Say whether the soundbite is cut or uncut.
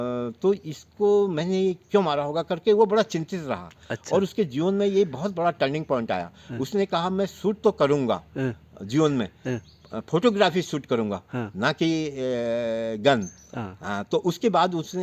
uncut